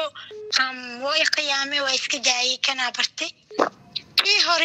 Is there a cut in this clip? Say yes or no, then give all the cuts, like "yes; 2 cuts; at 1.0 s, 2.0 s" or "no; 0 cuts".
yes; 1 cut; at 3.4 s